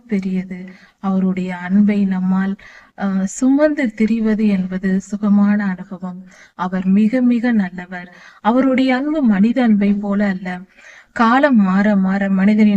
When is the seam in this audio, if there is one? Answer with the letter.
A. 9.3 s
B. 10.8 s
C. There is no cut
B